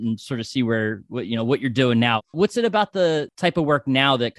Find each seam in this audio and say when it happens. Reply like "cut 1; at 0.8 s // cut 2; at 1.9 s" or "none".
cut 1; at 2.3 s // cut 2; at 3.3 s